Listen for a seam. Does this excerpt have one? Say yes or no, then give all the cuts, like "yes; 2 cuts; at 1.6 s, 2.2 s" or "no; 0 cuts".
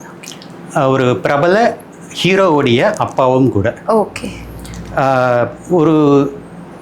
no; 0 cuts